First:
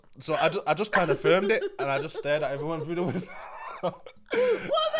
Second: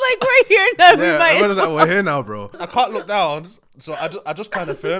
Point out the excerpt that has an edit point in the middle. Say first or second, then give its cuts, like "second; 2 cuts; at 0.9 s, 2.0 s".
second; 1 cut; at 2.6 s